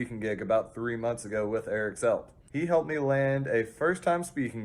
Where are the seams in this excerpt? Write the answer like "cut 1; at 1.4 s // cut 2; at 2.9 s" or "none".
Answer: cut 1; at 2.4 s